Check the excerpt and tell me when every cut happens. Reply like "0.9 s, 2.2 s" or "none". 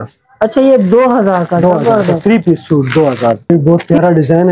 3.5 s

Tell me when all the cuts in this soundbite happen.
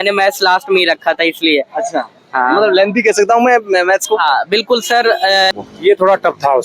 5.5 s

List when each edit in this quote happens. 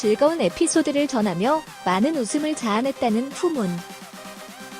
3.8 s

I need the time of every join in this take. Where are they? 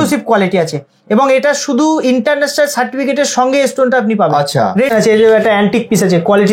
4.9 s

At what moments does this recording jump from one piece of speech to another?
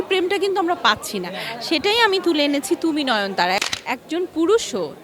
3.6 s

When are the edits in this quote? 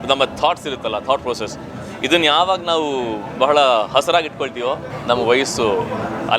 4.9 s

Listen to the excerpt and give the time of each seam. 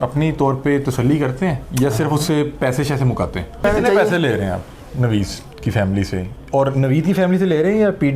3.6 s

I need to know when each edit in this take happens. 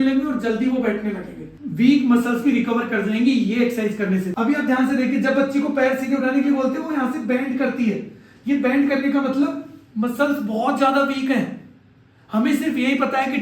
1.5 s, 4.3 s

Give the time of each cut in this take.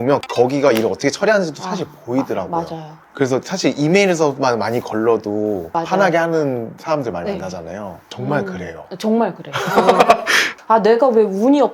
none

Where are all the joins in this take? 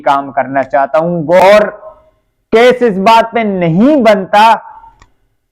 1.4 s

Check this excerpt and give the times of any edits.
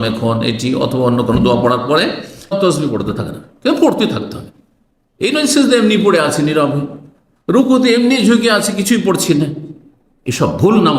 2.6 s

